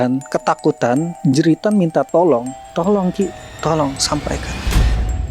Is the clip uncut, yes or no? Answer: no